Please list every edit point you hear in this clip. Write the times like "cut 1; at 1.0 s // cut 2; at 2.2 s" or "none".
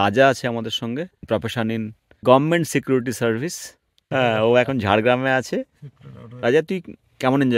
cut 1; at 1.1 s